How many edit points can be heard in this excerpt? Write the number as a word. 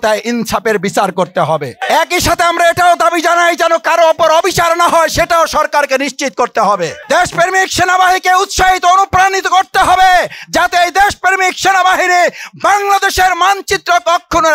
two